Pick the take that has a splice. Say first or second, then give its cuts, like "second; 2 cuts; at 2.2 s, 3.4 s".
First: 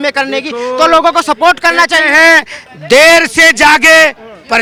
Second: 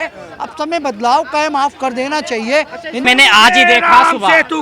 second; 1 cut; at 3.0 s